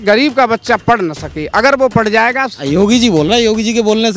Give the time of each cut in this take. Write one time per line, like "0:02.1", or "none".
0:02.6